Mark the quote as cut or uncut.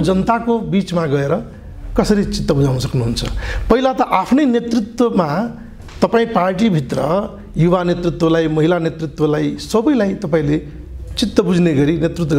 uncut